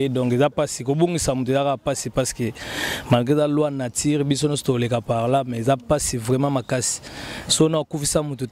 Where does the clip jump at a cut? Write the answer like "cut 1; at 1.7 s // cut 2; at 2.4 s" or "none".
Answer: none

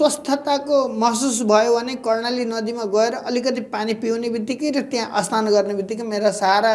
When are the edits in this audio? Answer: none

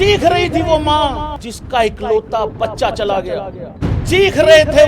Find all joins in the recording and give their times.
cut 1; at 1.3 s // cut 2; at 3.6 s

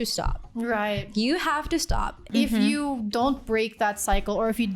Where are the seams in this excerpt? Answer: cut 1; at 2.2 s

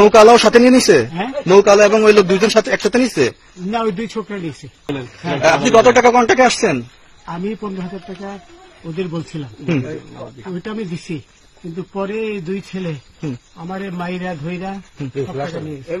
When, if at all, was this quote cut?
cut 1; at 4.9 s

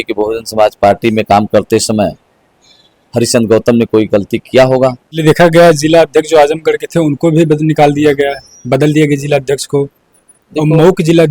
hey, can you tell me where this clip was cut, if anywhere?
cut 1; at 5.1 s

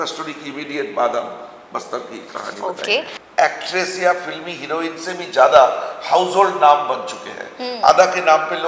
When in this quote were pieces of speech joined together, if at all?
cut 1; at 3.2 s

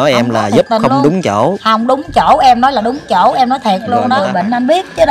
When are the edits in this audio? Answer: cut 1; at 4.2 s

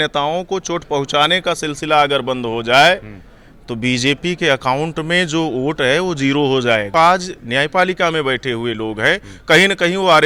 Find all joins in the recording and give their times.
cut 1; at 6.9 s

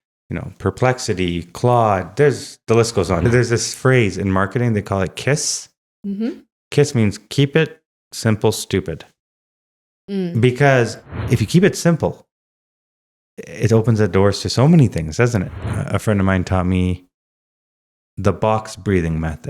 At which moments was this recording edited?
cut 1; at 3.2 s // cut 2; at 11.1 s // cut 3; at 15.6 s

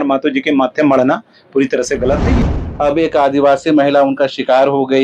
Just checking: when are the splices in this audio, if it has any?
cut 1; at 2.4 s

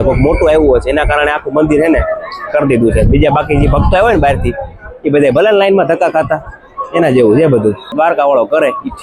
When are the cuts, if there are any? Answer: cut 1; at 7.9 s

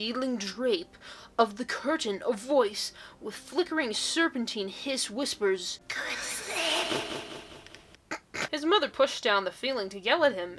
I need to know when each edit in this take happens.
cut 1; at 8.4 s

